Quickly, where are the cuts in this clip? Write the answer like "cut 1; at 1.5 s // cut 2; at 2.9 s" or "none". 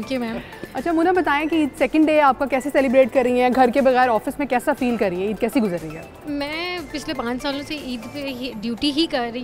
none